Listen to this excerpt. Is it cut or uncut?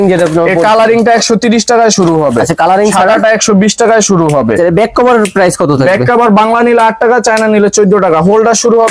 uncut